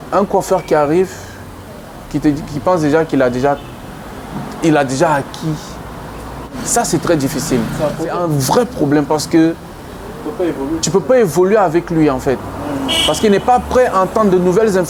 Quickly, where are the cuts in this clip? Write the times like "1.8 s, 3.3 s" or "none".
6.5 s, 8.2 s